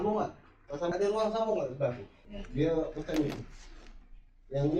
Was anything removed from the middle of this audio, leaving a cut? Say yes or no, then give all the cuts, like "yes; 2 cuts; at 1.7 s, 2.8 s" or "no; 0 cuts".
yes; 2 cuts; at 0.9 s, 2.3 s